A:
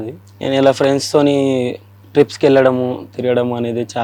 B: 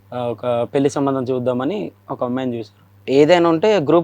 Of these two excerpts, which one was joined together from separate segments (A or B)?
B